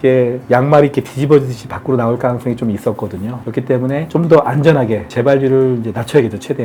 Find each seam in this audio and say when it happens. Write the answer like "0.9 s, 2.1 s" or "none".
none